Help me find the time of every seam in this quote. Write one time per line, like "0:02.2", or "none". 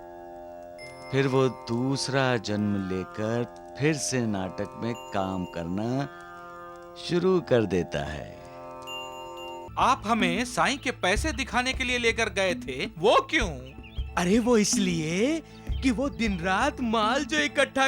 0:09.7